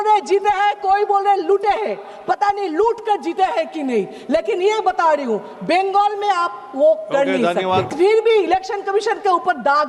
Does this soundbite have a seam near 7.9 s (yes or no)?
yes